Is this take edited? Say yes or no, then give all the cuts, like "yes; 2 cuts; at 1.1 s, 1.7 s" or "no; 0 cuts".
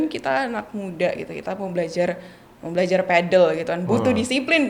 no; 0 cuts